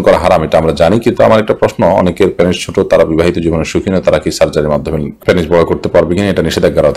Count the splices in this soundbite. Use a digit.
0